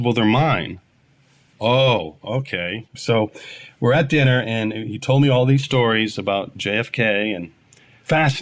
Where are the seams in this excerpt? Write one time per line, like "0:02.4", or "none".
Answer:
0:02.9

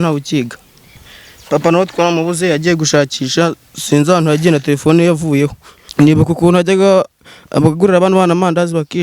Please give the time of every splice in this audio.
0:01.0
0:05.8

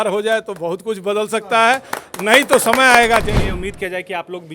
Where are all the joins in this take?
0:03.3

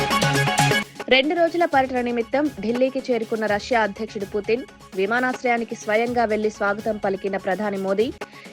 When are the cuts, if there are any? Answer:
0:00.9

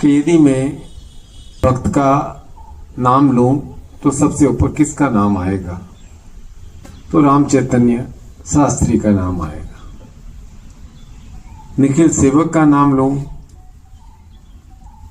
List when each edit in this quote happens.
0:01.6

